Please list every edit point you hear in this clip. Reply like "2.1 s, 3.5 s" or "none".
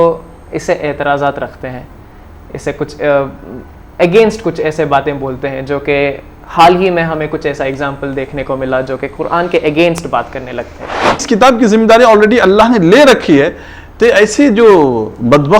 11.2 s